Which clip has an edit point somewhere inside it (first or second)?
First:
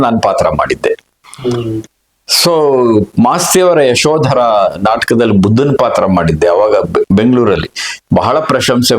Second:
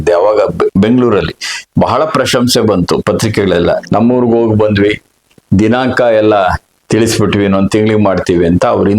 second